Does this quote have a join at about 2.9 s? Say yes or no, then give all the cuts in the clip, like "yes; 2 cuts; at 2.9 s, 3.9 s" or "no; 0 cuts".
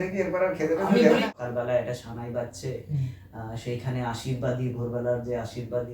no; 1 cut; at 1.3 s